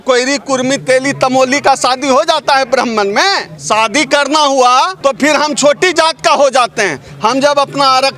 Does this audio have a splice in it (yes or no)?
yes